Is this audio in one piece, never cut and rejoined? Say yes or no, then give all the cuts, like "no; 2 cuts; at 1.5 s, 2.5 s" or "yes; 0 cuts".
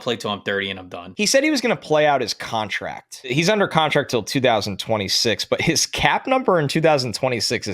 no; 2 cuts; at 1.0 s, 3.3 s